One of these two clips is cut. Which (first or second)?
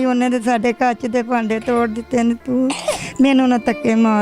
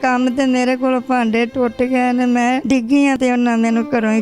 second